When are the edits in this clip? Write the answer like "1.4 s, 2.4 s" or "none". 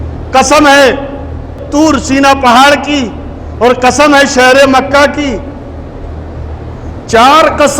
1.5 s